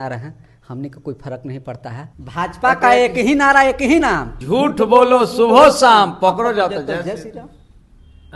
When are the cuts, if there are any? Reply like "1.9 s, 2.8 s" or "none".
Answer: 2.1 s, 4.3 s